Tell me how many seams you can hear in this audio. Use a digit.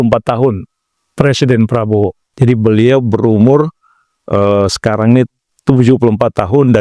2